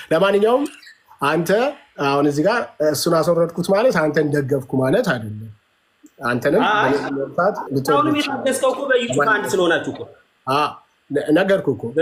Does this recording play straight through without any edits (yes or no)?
yes